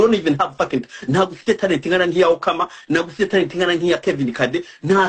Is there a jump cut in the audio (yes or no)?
no